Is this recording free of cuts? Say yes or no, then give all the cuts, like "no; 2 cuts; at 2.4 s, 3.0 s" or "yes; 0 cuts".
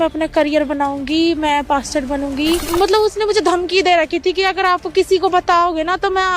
no; 1 cut; at 2.7 s